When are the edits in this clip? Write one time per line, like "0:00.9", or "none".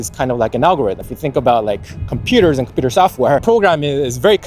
0:01.1
0:03.4